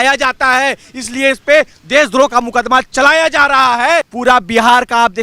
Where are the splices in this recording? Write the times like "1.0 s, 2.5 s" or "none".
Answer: 4.1 s